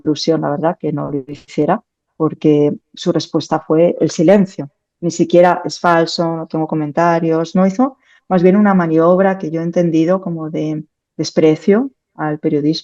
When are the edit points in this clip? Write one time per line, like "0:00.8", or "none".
none

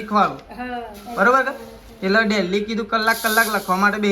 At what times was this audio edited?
none

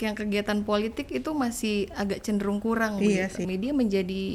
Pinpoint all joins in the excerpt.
0:03.5

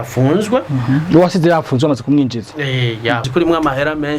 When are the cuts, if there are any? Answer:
0:03.3

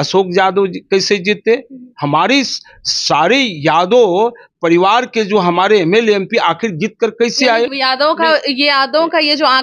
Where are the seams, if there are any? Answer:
0:07.7

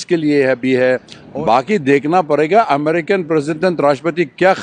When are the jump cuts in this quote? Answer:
0:01.2

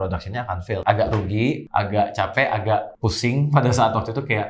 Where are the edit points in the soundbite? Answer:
0:00.8
0:01.6
0:02.9

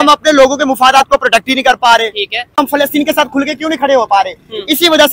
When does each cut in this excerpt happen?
0:02.6

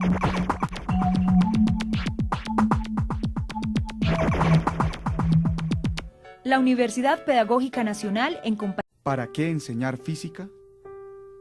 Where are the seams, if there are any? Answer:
none

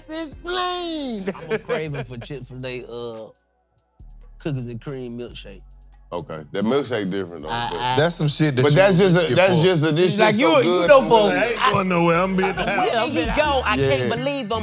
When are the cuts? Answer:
0:01.9
0:13.0

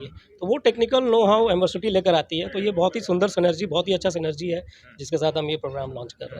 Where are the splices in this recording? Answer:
none

